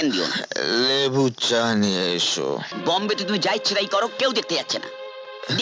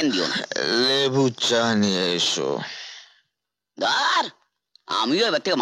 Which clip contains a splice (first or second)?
first